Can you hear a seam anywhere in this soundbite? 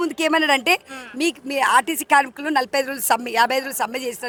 no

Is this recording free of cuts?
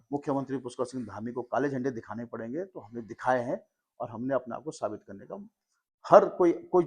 yes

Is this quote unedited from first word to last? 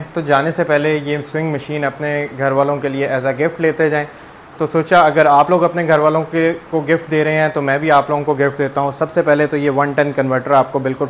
yes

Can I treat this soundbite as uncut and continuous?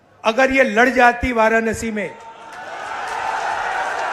yes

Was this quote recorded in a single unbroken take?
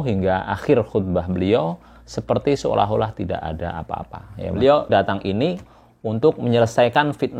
no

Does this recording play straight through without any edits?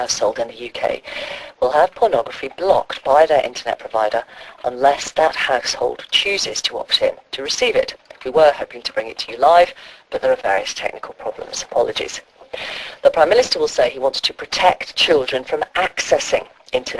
yes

